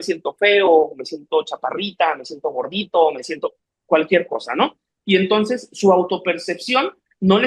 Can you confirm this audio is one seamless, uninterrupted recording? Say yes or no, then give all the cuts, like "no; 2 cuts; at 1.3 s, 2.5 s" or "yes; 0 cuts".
yes; 0 cuts